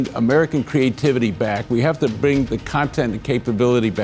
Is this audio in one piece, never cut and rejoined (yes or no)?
yes